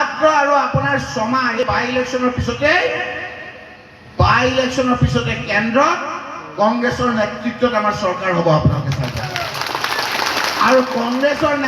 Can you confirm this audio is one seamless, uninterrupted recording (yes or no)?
no